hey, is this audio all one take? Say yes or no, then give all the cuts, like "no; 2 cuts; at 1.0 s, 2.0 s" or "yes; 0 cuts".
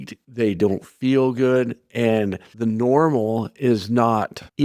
yes; 0 cuts